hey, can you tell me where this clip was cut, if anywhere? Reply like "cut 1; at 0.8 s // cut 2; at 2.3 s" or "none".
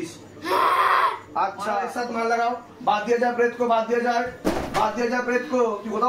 cut 1; at 1.7 s